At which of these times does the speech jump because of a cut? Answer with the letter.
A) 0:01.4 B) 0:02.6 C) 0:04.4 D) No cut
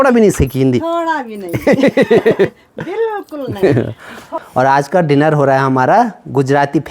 C